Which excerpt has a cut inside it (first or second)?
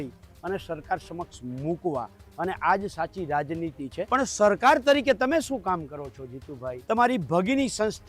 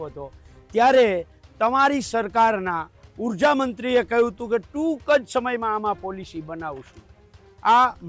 first